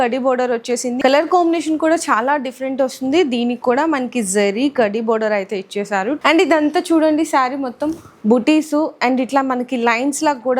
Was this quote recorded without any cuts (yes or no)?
no